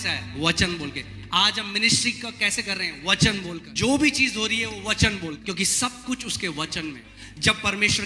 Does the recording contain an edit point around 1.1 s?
no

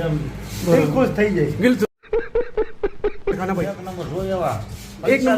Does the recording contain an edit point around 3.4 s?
yes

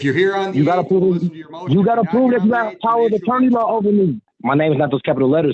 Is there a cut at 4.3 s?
yes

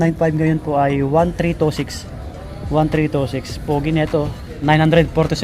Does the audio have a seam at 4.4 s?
yes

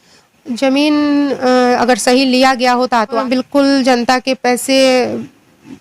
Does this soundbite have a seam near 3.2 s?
yes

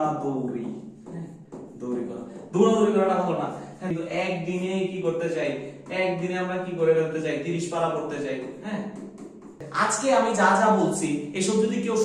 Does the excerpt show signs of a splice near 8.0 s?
no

